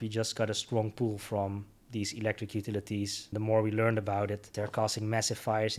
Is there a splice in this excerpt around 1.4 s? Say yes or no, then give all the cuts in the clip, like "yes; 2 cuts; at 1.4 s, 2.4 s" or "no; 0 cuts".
no; 2 cuts; at 3.3 s, 4.5 s